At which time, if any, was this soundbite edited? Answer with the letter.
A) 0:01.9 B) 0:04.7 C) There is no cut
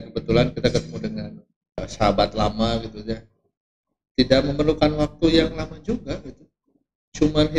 A